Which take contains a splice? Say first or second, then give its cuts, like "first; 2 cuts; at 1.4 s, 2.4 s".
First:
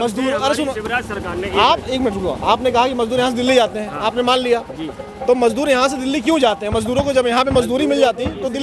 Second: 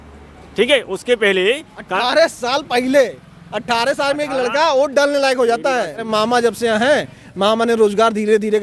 second; 1 cut; at 6.1 s